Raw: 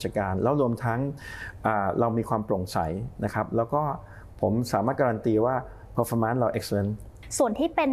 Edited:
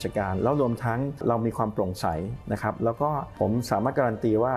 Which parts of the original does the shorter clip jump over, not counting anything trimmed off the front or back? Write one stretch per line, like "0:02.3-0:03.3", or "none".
0:01.2-0:01.9
0:04.0-0:04.3